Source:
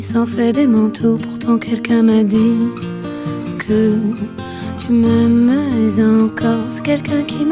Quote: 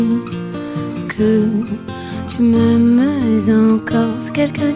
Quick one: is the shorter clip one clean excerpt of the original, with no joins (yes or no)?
yes